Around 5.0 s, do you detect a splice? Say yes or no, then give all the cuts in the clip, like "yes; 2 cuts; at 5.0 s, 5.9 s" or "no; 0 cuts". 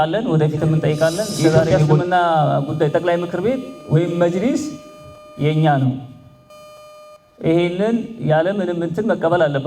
no; 1 cut; at 1.8 s